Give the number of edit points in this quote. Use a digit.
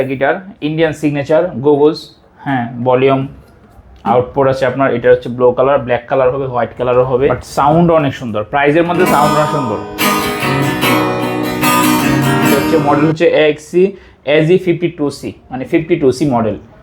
2